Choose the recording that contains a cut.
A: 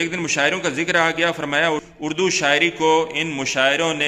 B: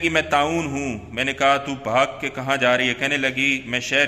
A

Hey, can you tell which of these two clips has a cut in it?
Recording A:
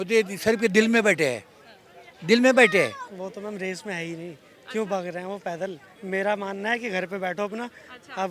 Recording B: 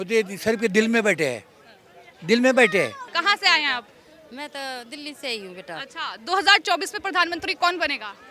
A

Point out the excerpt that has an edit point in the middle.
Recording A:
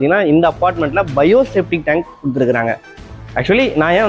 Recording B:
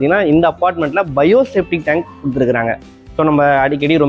A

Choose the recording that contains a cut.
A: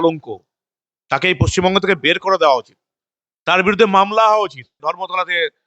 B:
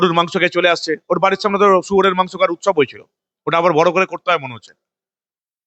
A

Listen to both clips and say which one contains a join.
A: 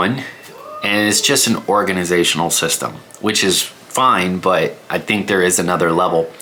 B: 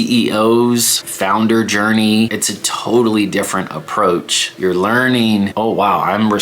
B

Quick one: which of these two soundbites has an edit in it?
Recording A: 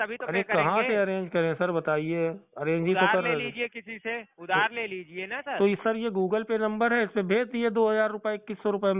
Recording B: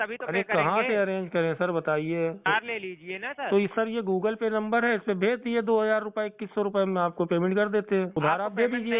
B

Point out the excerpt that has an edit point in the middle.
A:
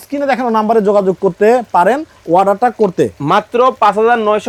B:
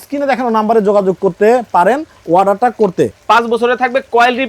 B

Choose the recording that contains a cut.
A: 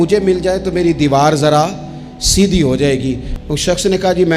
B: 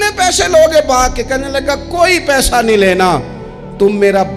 A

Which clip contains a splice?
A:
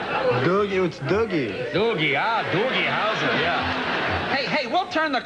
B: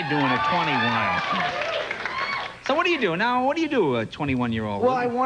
B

